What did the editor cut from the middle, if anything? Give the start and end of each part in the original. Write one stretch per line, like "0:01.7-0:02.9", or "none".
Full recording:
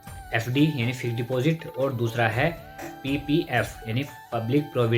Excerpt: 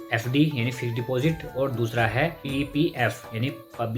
0:02.6-0:03.0